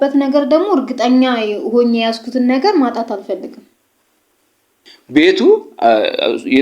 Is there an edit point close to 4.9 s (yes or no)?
yes